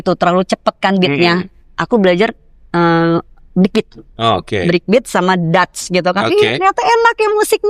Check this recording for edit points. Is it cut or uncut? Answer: uncut